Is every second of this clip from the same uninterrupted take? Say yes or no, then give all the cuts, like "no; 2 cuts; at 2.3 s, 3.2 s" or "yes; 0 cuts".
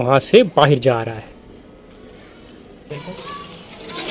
no; 1 cut; at 2.9 s